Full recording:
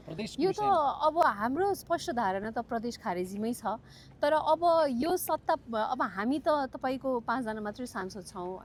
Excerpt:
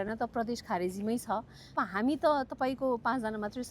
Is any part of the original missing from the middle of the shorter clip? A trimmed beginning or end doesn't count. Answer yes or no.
yes